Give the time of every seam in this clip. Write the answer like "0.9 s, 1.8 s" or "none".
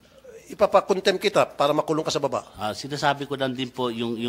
none